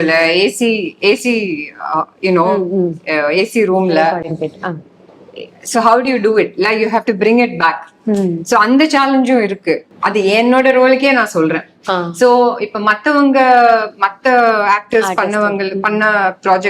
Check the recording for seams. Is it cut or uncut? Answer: cut